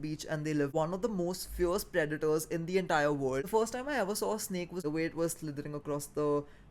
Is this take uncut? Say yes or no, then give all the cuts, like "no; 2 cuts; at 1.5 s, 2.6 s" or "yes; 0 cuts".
no; 3 cuts; at 0.7 s, 3.4 s, 4.8 s